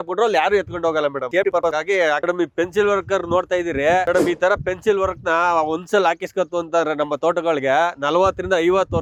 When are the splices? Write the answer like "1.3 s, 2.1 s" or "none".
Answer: none